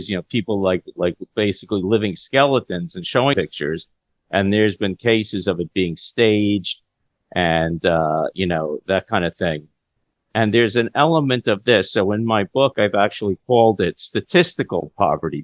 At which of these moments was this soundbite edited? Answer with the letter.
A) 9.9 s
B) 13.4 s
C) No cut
C